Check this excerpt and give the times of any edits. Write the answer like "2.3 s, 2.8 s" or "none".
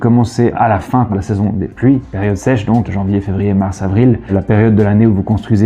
1.1 s, 2.9 s, 4.3 s